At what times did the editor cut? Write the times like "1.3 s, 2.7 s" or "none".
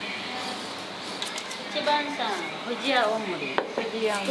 1.2 s